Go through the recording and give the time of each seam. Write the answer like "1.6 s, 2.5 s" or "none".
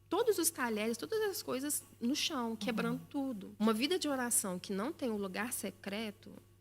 3.6 s